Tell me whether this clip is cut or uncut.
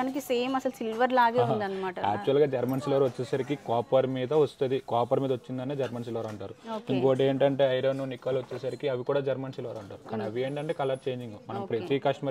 uncut